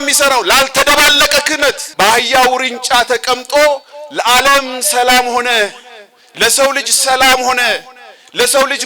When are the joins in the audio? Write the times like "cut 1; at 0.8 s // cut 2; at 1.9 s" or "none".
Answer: cut 1; at 1.8 s